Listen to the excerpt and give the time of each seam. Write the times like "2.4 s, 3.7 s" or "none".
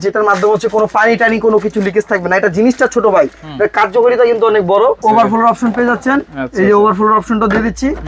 5.0 s